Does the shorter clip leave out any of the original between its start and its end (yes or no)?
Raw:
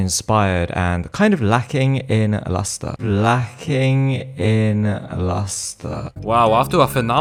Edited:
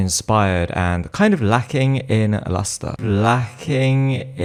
no